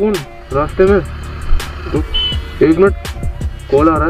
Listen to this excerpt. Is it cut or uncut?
cut